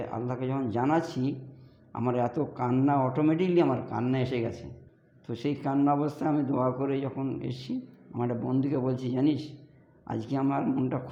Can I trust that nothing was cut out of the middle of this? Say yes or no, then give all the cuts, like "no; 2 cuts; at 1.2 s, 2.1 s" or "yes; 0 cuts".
yes; 0 cuts